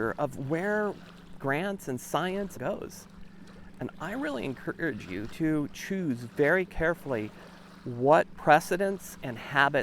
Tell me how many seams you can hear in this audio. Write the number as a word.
two